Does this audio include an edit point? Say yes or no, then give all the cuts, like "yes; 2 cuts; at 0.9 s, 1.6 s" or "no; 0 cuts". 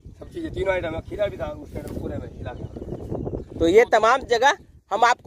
no; 0 cuts